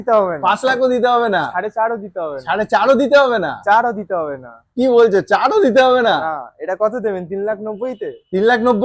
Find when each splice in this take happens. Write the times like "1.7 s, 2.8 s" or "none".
none